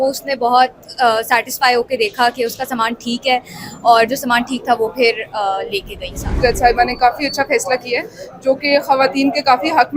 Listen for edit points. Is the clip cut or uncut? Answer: cut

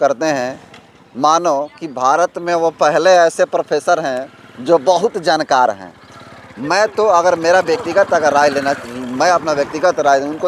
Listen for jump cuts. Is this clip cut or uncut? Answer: uncut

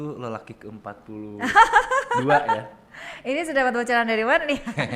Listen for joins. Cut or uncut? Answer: uncut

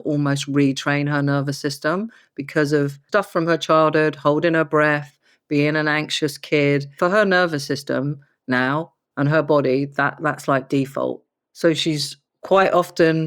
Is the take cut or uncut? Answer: cut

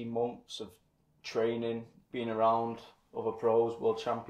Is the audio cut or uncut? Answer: uncut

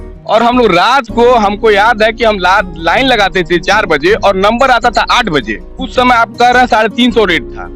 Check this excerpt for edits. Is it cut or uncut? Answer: uncut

